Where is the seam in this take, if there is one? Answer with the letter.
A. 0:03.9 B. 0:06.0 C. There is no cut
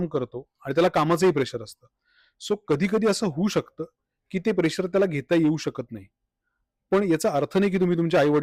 C